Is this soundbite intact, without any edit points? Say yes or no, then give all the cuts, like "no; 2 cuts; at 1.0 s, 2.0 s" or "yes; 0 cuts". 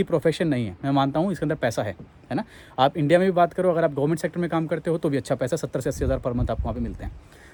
yes; 0 cuts